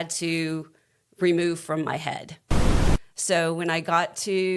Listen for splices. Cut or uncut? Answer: cut